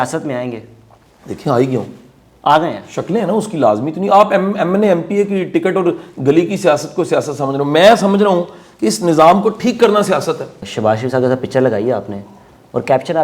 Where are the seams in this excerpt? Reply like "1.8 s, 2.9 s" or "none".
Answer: 10.6 s